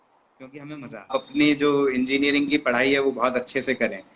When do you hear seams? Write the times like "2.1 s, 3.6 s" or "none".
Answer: 1.1 s